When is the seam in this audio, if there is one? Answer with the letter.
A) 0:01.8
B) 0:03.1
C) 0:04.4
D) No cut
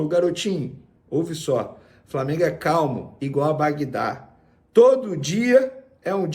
D